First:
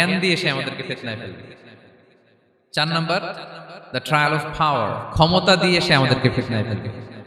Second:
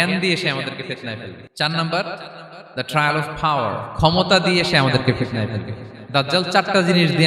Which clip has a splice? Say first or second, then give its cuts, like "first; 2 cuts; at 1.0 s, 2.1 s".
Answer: second; 1 cut; at 1.4 s